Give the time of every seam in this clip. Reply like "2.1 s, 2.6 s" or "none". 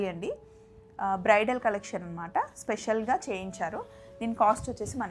none